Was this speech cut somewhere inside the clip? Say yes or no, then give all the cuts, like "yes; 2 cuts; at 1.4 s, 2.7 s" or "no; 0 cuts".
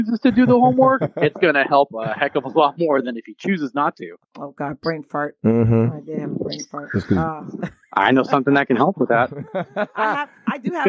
yes; 1 cut; at 4.1 s